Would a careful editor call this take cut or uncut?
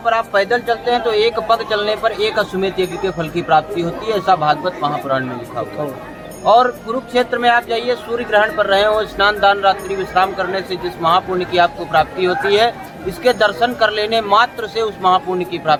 uncut